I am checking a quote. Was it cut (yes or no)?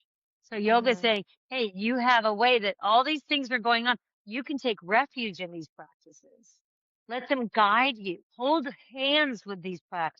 yes